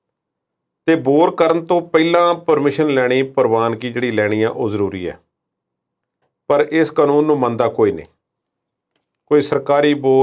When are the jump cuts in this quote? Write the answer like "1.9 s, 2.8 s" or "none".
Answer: none

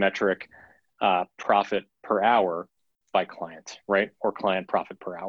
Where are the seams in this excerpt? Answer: none

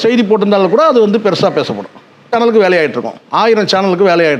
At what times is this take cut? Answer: none

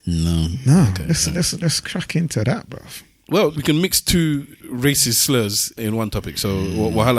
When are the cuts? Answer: 3.6 s, 4.6 s, 5.8 s

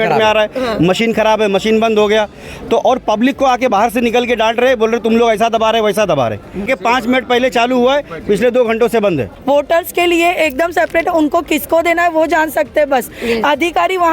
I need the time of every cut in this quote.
6.7 s, 9.4 s

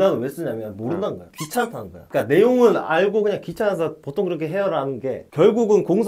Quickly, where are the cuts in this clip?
none

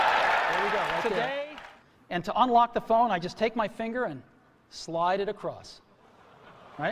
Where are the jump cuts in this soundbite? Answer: 1.6 s

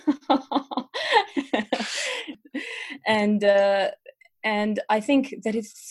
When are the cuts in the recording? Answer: 2.4 s

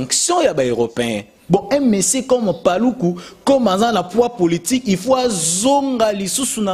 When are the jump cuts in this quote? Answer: 1.3 s

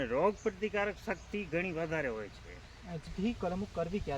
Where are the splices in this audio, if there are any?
3.1 s

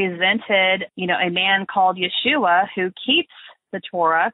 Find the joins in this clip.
0.9 s

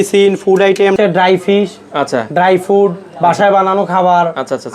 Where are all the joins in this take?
1.0 s

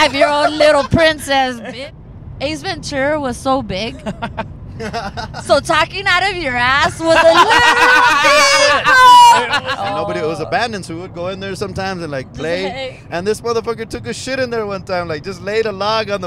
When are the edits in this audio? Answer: 1.6 s, 9.6 s

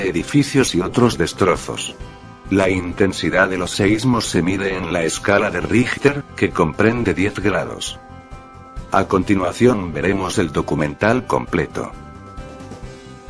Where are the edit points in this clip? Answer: 2.9 s

